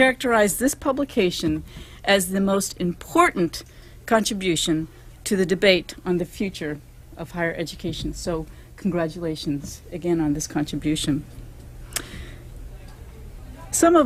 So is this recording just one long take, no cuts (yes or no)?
yes